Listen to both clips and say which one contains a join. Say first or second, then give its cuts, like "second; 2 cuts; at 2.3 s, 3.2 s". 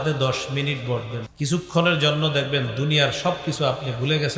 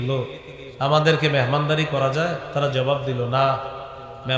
first; 1 cut; at 1.2 s